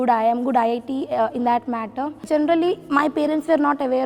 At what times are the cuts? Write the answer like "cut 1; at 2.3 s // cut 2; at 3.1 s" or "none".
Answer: cut 1; at 2.2 s